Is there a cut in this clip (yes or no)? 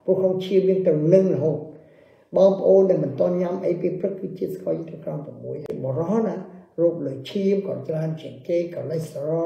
yes